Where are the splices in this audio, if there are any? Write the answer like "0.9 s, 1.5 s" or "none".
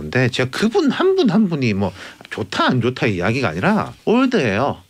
3.9 s